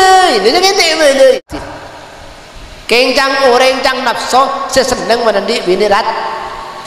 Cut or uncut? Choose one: cut